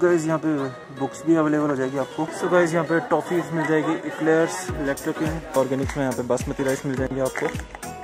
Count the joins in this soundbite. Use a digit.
2